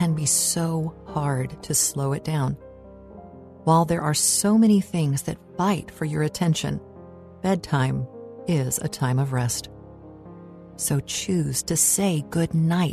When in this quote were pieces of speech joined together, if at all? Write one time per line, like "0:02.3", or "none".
none

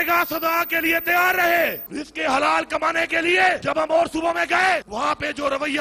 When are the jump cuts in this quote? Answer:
0:01.9
0:03.6
0:04.9

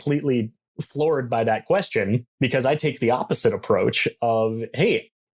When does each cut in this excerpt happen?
0:02.3

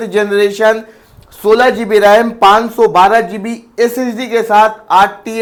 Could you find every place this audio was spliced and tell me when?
none

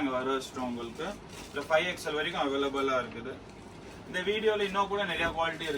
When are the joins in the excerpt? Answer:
none

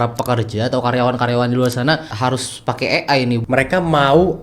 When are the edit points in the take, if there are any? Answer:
0:02.1
0:03.4

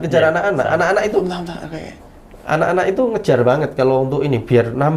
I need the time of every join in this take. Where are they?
none

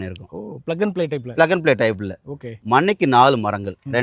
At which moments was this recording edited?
0:02.5

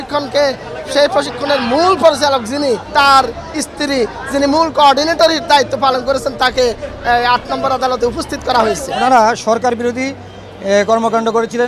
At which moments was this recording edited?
0:02.9
0:09.0

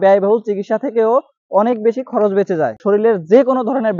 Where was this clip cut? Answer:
0:02.8

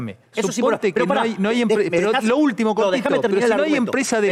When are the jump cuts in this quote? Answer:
none

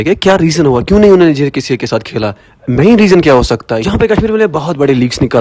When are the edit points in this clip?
0:03.8

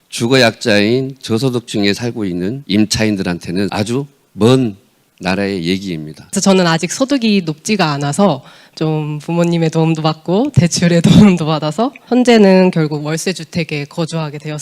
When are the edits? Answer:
0:02.6
0:03.7
0:06.2
0:12.0

